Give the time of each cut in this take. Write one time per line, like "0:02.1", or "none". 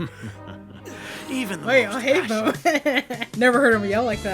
0:03.2

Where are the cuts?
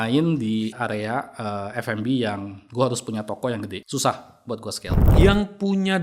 0:00.7
0:03.8
0:04.9

